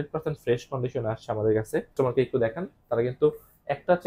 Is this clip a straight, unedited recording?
no; 1 cut; at 1.9 s

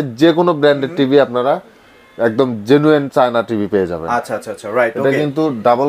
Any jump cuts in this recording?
no; 0 cuts

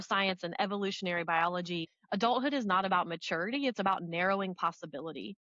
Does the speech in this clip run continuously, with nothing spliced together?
no; 1 cut; at 1.9 s

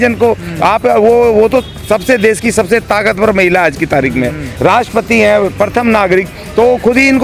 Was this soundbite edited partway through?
no; 0 cuts

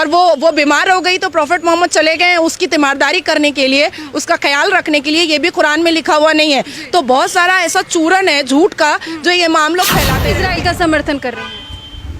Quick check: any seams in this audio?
yes; 1 cut; at 10.2 s

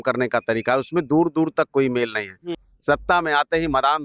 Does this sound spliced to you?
yes; 1 cut; at 2.5 s

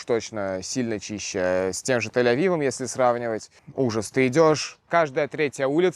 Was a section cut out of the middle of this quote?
yes; 2 cuts; at 3.6 s, 4.8 s

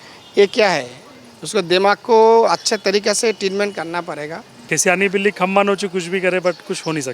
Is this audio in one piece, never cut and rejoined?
no; 1 cut; at 4.6 s

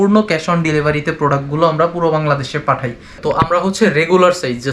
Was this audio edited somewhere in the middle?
yes; 1 cut; at 3.1 s

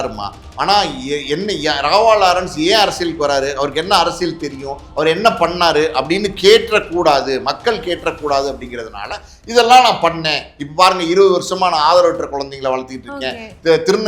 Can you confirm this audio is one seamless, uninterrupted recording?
yes; 0 cuts

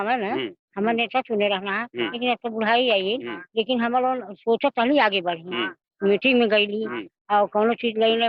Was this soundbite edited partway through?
no; 0 cuts

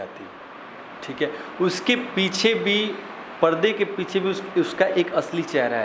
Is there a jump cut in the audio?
no; 0 cuts

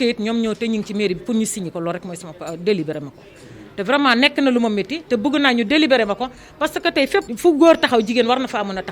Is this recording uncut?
no; 1 cut; at 7.3 s

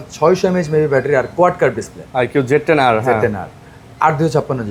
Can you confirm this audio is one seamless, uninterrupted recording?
yes; 0 cuts

